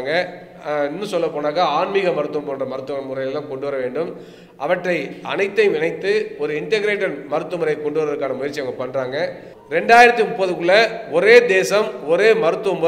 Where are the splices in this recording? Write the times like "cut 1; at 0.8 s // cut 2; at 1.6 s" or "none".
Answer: cut 1; at 9.5 s